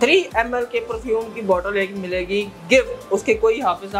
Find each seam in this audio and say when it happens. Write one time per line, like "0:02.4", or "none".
none